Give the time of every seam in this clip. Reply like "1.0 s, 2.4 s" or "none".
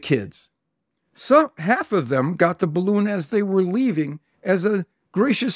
none

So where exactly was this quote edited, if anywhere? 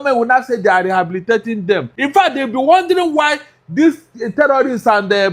1.9 s

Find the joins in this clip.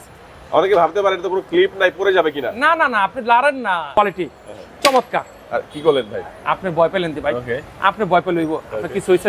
4.0 s

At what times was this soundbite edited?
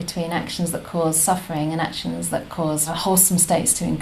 3.0 s

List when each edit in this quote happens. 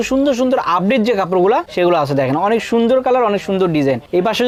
none

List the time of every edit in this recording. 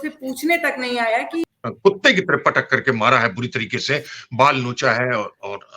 1.6 s

